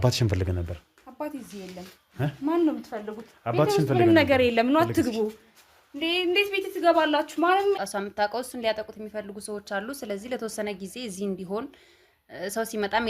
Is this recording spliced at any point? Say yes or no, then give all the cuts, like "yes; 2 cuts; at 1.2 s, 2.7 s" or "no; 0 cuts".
yes; 1 cut; at 7.8 s